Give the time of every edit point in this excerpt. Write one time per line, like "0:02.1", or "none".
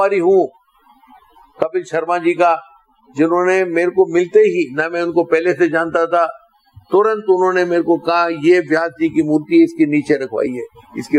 none

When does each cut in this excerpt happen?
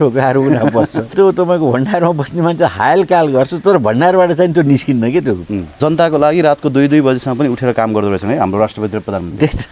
0:01.1
0:05.8

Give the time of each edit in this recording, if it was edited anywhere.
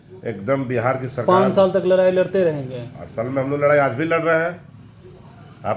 none

